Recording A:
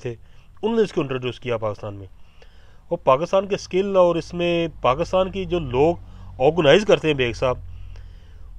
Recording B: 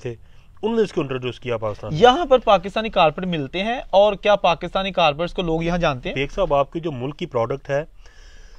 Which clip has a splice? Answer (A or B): B